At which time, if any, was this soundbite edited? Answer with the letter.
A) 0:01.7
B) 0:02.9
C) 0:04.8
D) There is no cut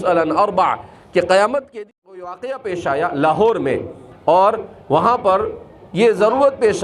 A